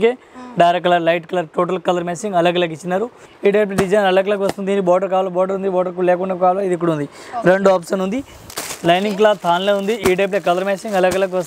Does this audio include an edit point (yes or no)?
yes